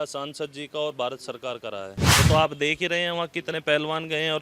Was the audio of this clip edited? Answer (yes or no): yes